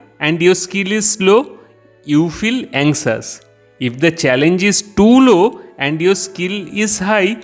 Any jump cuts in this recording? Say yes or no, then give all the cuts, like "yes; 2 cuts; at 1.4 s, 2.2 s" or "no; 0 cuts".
no; 0 cuts